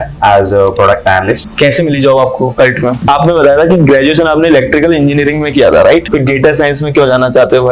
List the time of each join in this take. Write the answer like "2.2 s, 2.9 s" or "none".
1.5 s, 3.0 s, 6.1 s